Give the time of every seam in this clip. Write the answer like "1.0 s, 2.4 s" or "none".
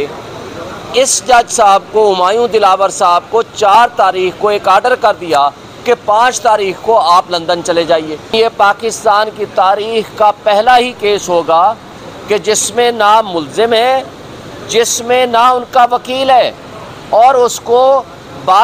8.3 s

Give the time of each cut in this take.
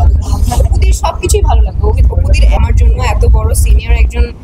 2.6 s

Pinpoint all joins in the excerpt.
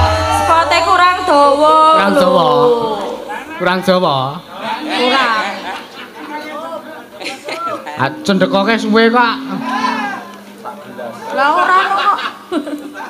none

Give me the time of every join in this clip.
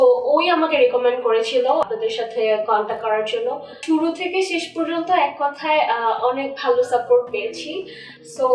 1.8 s, 3.8 s

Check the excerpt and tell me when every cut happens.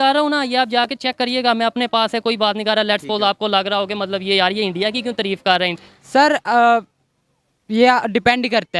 5.7 s

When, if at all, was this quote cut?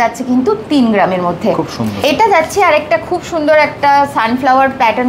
2.0 s

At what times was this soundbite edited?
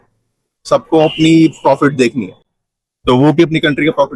none

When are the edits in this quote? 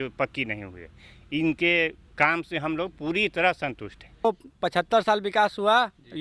4.2 s

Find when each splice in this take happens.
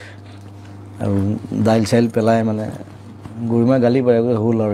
none

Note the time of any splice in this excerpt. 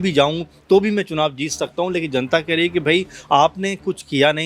none

